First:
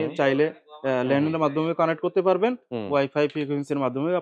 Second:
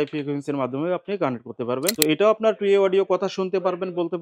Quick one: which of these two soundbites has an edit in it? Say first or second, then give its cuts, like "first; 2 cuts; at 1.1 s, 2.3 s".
second; 1 cut; at 1.9 s